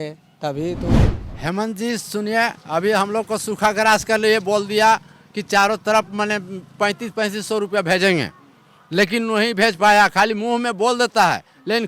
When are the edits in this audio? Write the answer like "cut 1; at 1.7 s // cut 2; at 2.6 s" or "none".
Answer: cut 1; at 1.1 s

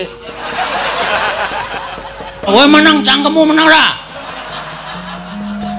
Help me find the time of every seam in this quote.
cut 1; at 2.5 s

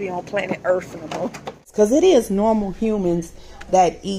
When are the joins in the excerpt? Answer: cut 1; at 1.7 s

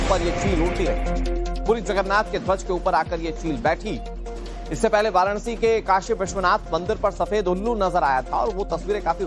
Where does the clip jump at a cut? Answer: cut 1; at 5.5 s

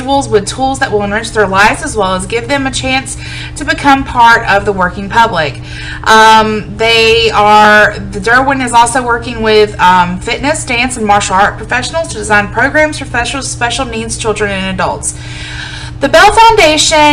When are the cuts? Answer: cut 1; at 9.2 s

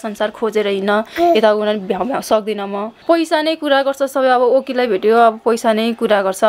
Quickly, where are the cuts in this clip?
cut 1; at 2.9 s

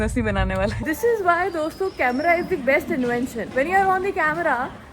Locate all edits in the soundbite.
cut 1; at 0.8 s // cut 2; at 3.4 s

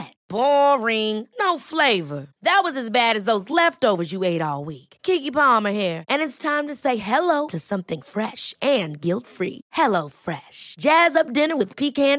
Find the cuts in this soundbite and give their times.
none

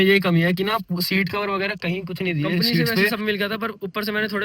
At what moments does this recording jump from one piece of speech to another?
cut 1; at 3.1 s

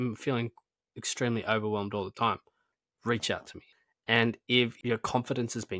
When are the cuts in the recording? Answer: cut 1; at 4.8 s

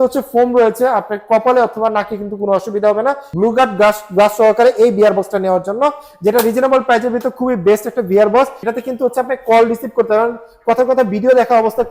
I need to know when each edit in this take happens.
cut 1; at 3.3 s // cut 2; at 8.6 s

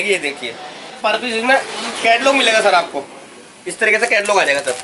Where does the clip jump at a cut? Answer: cut 1; at 1.0 s

